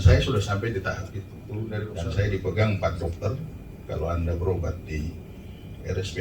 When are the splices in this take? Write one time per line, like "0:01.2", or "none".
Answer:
0:01.9